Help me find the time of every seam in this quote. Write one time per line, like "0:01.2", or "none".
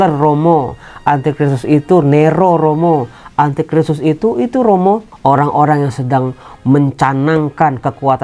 0:05.1